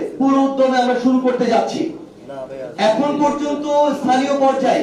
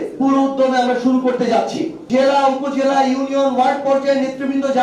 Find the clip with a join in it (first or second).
second